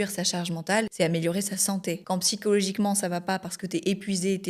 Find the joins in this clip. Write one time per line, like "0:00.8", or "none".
0:00.9
0:02.0